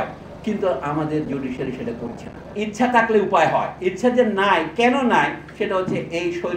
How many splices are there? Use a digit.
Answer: 1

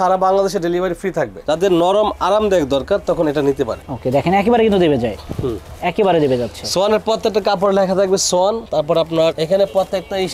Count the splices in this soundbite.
1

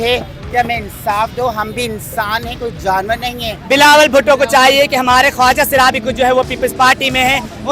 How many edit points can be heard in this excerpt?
1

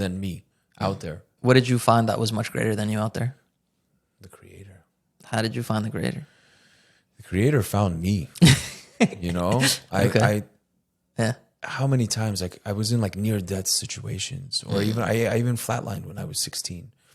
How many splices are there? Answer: 1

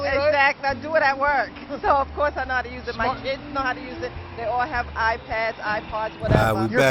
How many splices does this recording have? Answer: 0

